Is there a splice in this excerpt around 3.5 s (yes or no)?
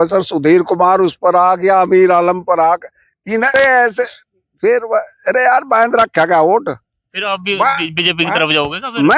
yes